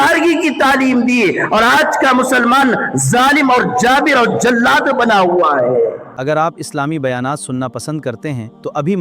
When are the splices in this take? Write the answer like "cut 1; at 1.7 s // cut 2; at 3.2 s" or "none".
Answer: cut 1; at 6.1 s